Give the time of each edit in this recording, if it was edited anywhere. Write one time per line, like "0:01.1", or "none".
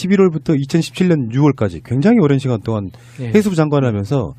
none